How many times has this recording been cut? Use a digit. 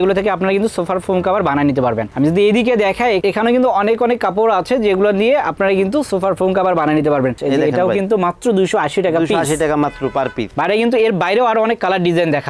2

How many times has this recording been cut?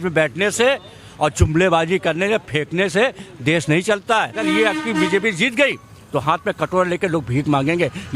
1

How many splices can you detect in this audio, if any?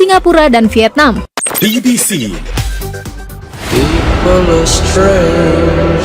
1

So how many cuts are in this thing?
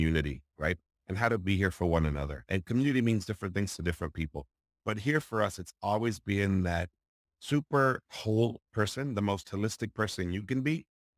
1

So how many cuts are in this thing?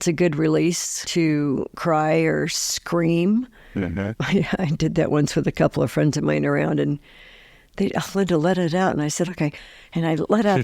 2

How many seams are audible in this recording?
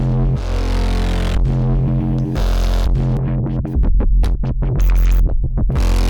1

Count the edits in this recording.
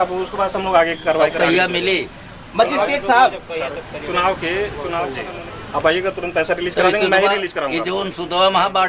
1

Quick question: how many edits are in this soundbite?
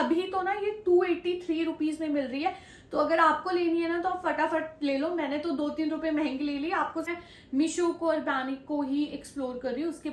1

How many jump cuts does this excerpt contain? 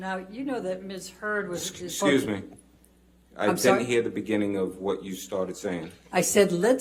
0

